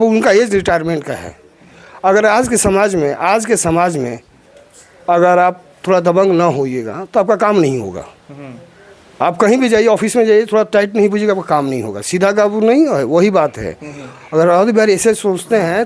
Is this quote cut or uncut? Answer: uncut